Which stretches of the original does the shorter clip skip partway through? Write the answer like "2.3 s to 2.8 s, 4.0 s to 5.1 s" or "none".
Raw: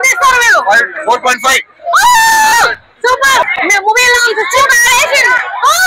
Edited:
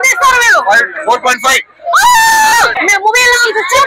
2.7 s to 3.6 s